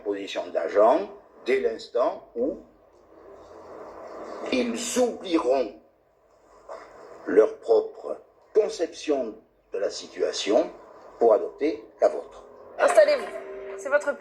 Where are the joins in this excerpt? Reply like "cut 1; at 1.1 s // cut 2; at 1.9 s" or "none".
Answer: none